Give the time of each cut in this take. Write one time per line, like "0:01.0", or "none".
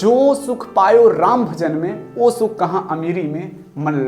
none

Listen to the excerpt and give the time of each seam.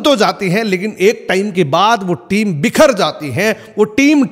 none

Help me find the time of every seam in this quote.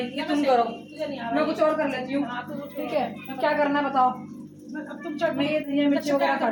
none

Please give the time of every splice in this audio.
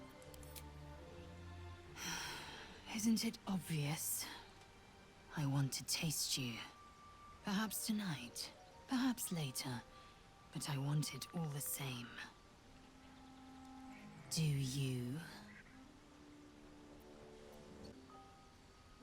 0:17.9

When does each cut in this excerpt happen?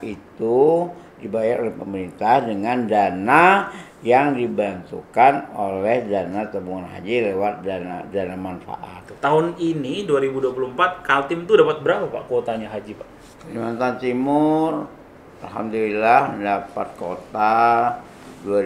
0:09.0

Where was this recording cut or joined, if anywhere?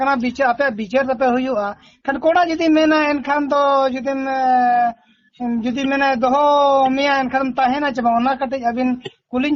none

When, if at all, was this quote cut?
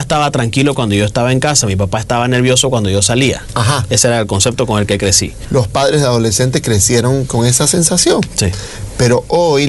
0:05.3

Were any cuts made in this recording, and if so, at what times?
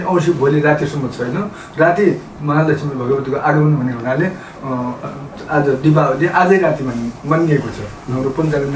none

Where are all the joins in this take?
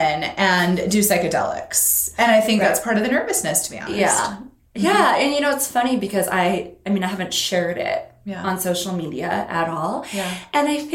none

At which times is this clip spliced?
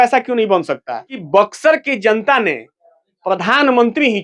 0:01.1

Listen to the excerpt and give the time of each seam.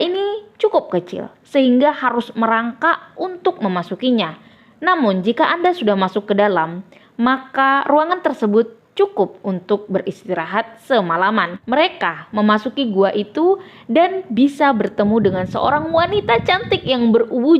0:11.6

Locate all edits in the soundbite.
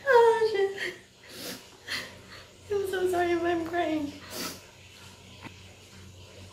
0:05.3

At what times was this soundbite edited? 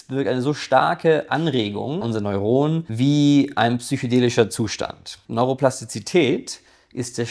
0:02.0
0:02.9
0:05.1

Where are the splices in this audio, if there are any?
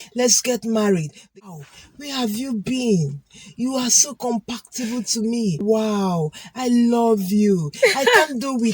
0:01.3
0:05.6

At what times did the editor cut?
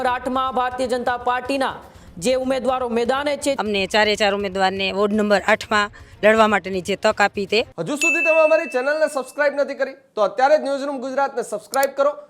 0:03.6
0:07.8

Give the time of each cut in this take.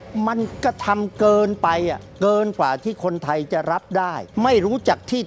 0:04.2

